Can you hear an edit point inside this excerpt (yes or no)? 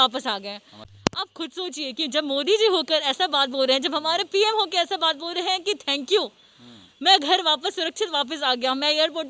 yes